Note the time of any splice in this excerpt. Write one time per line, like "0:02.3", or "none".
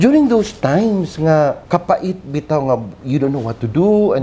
0:01.6